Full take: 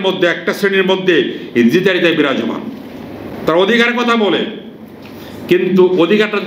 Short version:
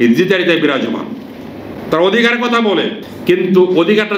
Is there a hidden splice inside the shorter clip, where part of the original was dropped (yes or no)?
yes